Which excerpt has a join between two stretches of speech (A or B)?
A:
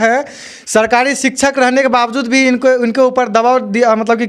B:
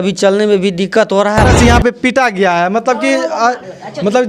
B